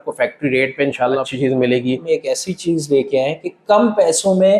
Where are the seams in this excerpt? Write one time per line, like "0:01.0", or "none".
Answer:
0:01.3
0:02.0